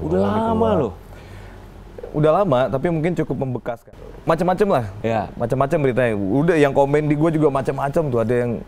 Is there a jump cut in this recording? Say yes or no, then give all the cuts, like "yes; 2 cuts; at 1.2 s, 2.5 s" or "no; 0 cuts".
yes; 1 cut; at 3.7 s